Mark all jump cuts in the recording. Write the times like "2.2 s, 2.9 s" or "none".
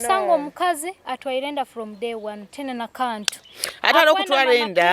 2.6 s